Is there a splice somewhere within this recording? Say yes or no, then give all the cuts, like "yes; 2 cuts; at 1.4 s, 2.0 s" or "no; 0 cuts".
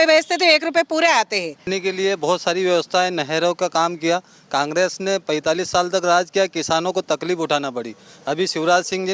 yes; 1 cut; at 1.7 s